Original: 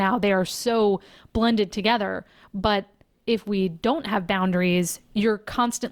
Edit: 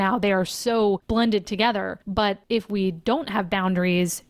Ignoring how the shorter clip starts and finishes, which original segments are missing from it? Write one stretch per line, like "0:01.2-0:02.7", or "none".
0:01.0-0:01.3
0:02.4-0:03.0